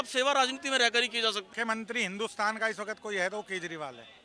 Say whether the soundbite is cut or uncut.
cut